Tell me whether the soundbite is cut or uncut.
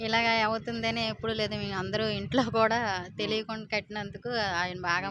uncut